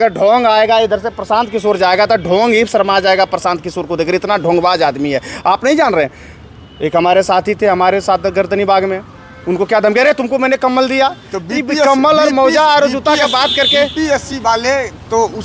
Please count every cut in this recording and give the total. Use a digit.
0